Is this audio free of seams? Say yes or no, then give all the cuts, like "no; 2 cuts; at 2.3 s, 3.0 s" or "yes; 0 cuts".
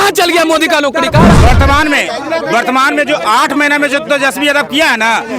no; 1 cut; at 1.3 s